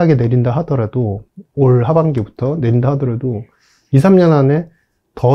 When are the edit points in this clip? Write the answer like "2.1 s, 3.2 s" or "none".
none